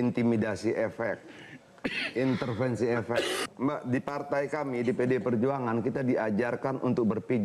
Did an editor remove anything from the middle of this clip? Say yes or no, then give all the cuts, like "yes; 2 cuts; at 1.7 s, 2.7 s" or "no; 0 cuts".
yes; 1 cut; at 3.4 s